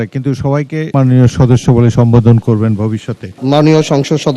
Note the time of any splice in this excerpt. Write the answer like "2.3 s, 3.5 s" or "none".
3.3 s